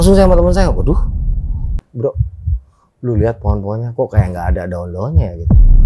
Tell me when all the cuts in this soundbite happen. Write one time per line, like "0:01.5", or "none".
0:01.8